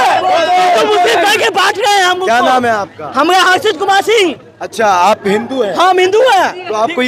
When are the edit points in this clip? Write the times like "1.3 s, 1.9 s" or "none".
none